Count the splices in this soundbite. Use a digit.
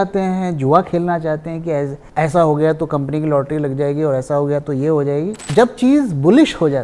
2